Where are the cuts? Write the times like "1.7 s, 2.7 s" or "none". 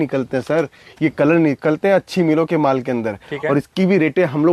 none